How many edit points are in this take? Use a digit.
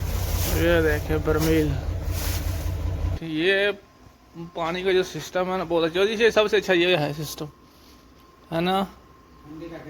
1